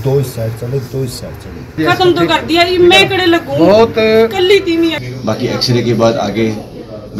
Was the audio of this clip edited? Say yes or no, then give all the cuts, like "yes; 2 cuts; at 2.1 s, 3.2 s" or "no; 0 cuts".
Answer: yes; 2 cuts; at 1.7 s, 4.9 s